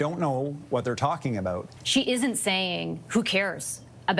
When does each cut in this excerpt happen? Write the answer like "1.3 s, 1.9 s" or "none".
1.7 s